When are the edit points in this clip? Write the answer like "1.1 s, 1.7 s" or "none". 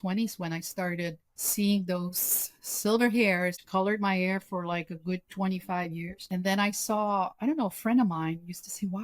3.6 s, 6.2 s